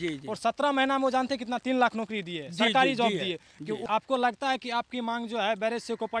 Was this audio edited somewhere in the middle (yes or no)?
yes